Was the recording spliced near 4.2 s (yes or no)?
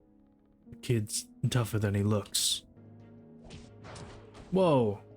no